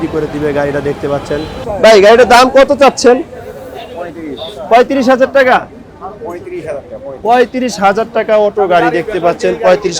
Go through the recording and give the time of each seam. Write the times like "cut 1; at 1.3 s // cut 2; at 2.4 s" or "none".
cut 1; at 1.6 s